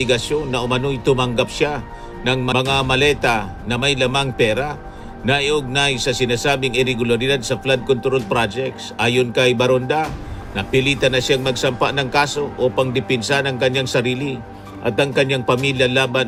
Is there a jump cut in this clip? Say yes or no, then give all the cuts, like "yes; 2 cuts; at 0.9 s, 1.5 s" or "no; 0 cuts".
no; 0 cuts